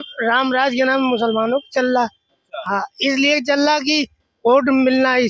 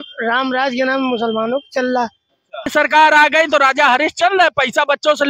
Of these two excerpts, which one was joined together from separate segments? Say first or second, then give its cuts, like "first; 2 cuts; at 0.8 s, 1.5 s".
second; 1 cut; at 2.7 s